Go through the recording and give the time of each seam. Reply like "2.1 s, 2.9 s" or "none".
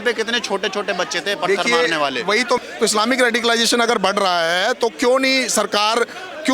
2.6 s